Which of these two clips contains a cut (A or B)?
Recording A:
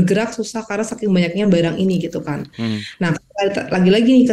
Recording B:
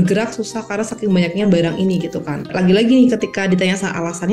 B